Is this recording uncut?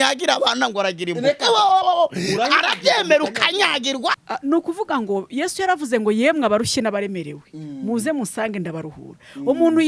no; 1 cut; at 4.3 s

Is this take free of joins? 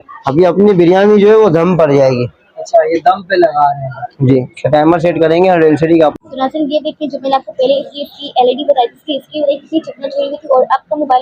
no; 1 cut; at 6.3 s

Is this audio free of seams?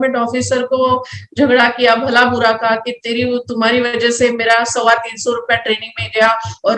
yes; 0 cuts

